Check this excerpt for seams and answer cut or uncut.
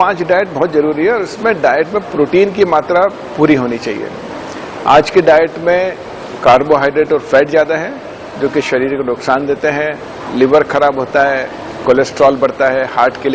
uncut